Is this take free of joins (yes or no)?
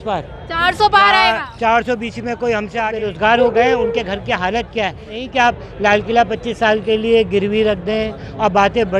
no